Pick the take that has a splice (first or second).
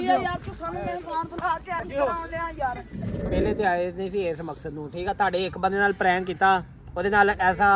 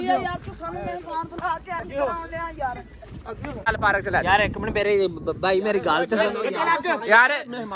first